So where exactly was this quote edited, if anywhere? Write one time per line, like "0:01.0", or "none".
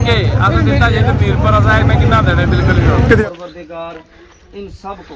0:03.2